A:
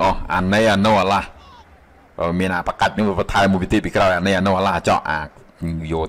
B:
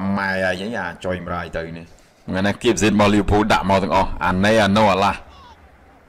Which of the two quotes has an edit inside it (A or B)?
B